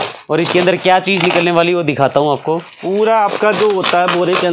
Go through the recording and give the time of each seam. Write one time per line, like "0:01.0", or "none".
none